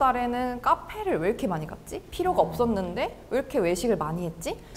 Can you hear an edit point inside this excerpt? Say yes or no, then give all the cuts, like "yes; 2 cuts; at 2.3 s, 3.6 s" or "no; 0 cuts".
no; 0 cuts